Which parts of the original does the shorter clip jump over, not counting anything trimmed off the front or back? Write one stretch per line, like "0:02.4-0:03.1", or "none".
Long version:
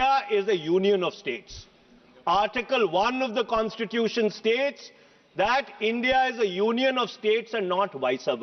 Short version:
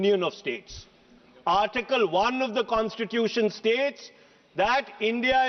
none